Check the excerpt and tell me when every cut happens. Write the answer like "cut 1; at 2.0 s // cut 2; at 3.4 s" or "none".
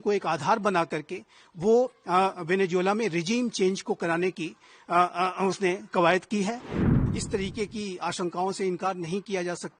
cut 1; at 6.8 s